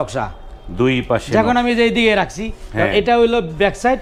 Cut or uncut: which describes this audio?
uncut